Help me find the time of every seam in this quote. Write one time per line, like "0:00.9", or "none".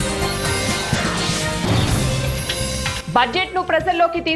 0:03.0